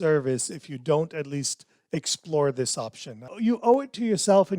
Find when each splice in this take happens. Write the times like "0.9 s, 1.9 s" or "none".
3.3 s